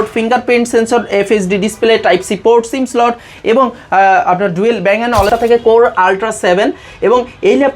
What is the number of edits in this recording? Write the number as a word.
one